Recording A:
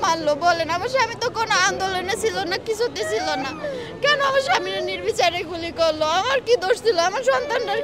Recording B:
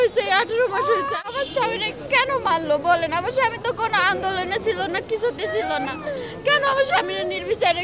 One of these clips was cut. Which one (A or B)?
B